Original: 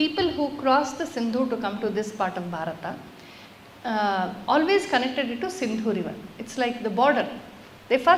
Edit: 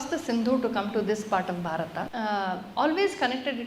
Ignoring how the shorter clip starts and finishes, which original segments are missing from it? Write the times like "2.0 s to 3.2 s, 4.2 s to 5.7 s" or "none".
3.0 s to 3.8 s